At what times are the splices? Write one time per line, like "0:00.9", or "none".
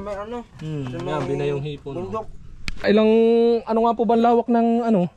0:02.8